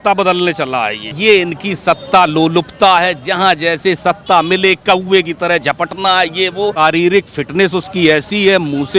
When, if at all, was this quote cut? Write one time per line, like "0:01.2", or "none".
0:01.1
0:06.8